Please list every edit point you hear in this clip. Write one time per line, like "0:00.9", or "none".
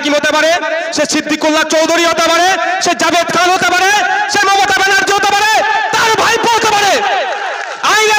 none